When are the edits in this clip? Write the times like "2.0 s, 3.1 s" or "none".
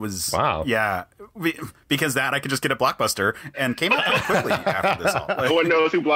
3.5 s